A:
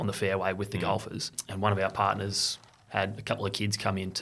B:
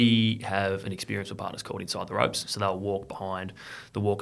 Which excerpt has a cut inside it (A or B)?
A